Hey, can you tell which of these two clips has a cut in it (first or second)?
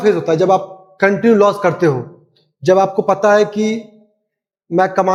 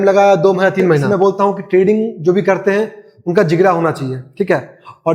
second